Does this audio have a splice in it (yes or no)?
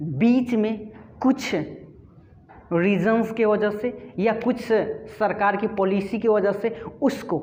no